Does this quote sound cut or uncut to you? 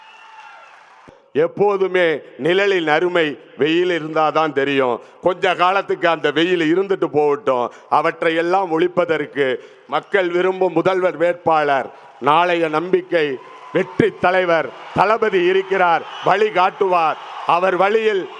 cut